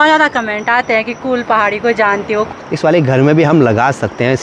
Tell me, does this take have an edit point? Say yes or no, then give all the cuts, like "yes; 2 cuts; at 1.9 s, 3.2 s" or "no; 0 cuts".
yes; 1 cut; at 2.5 s